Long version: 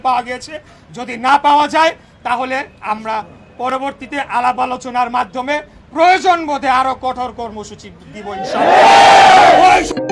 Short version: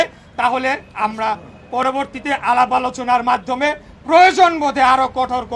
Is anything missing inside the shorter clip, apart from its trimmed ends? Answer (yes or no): no